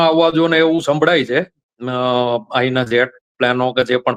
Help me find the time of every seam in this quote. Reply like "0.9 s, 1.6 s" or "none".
none